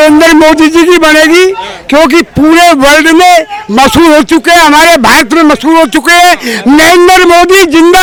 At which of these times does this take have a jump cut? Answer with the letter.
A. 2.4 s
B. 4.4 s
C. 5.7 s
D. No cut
D